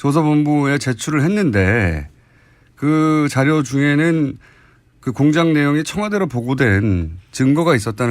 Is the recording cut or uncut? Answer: cut